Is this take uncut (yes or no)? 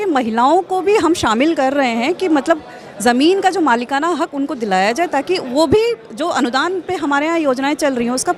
yes